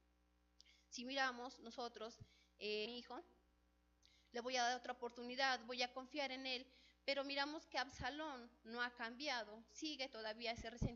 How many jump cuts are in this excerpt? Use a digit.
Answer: 0